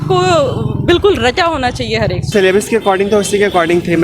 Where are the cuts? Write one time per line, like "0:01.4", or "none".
none

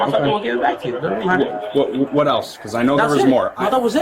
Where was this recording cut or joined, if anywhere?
none

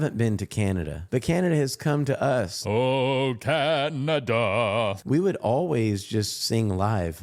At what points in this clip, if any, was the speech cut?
0:01.0
0:02.6
0:05.0

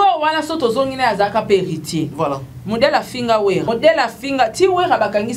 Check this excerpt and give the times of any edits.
0:02.1
0:03.7

